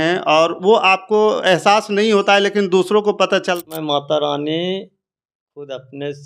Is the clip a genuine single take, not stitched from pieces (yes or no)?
no